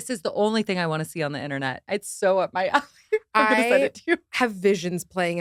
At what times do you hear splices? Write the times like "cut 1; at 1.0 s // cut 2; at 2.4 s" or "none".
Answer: none